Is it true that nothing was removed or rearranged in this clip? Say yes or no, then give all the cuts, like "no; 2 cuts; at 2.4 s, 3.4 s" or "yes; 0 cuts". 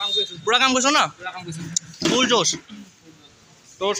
yes; 0 cuts